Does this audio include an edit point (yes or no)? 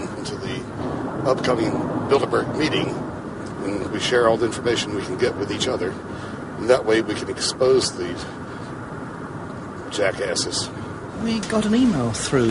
no